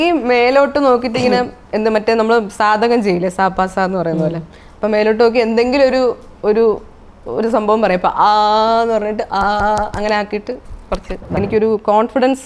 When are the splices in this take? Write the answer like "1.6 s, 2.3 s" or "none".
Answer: 11.4 s

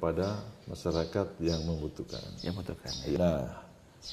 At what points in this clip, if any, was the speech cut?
3.2 s

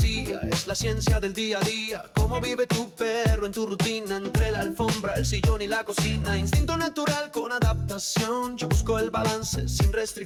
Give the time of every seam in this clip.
none

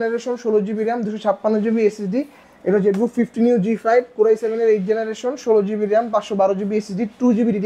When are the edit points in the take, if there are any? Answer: 2.4 s

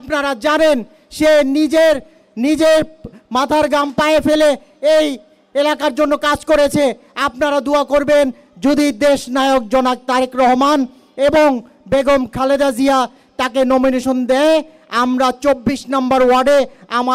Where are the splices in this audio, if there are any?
none

